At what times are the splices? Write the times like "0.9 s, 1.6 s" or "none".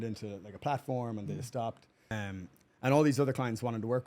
2.1 s